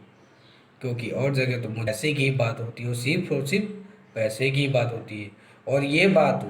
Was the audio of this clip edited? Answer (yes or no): yes